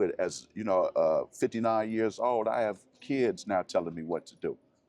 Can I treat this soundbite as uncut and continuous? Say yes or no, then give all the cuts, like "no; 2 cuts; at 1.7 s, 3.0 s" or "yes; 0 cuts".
yes; 0 cuts